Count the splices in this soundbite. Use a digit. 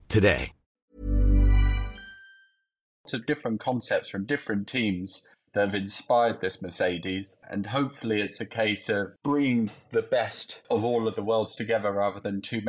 4